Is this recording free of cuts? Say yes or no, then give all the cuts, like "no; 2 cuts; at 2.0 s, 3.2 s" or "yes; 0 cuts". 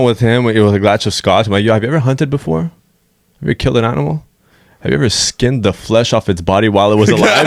yes; 0 cuts